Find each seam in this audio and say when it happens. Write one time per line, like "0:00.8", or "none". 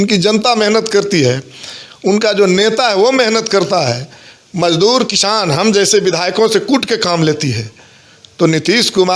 none